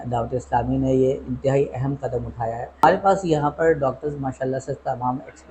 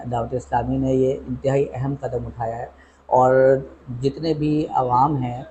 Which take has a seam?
first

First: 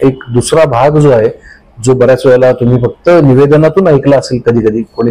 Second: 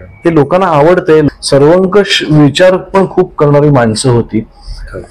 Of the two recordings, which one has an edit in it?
second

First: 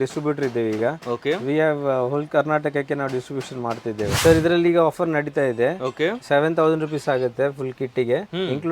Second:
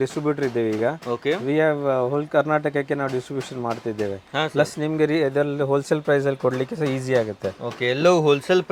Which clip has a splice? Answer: first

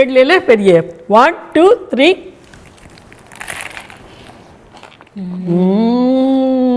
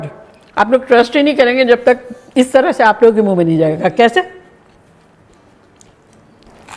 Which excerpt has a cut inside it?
first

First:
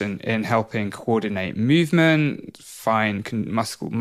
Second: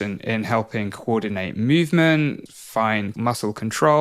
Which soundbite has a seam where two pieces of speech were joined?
second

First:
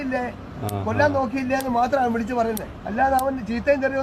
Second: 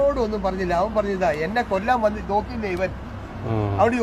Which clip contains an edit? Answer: first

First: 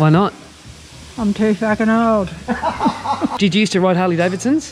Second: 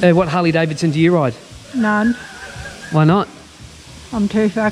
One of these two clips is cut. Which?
first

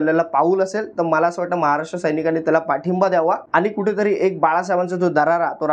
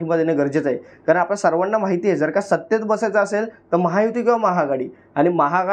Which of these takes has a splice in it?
first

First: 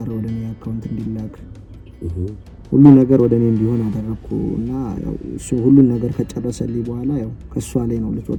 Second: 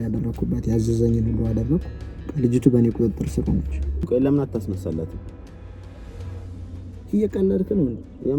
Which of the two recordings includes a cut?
second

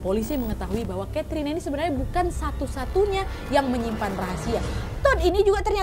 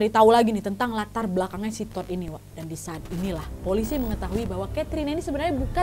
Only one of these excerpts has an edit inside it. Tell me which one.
second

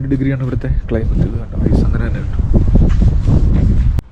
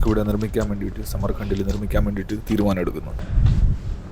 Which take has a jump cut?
second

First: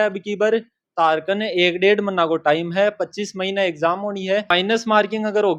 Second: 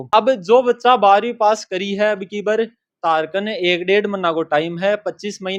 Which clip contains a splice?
first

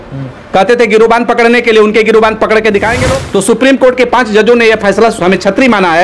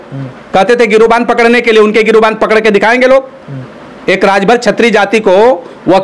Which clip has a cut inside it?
first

